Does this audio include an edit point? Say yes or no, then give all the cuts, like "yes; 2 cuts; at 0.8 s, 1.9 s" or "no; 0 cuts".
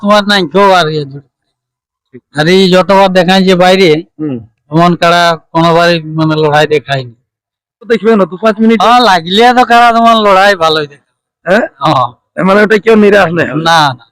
yes; 1 cut; at 7.9 s